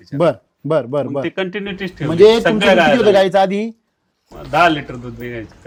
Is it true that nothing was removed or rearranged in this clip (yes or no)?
yes